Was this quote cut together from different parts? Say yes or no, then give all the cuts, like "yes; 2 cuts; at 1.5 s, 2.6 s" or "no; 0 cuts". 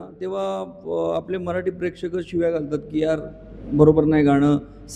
no; 0 cuts